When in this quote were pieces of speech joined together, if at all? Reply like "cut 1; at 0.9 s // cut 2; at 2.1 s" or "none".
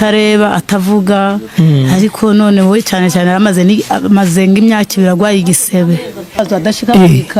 cut 1; at 6.4 s